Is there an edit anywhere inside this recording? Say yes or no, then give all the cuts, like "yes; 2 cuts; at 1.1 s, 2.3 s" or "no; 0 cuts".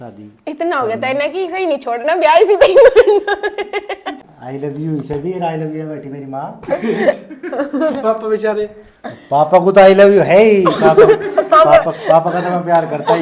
yes; 1 cut; at 4.1 s